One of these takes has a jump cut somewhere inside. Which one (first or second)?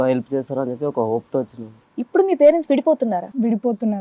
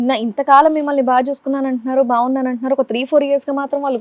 first